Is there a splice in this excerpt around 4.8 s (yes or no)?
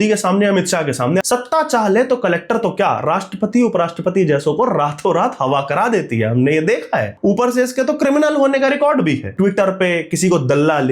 no